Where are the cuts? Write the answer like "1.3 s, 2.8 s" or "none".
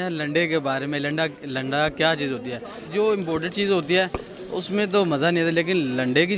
none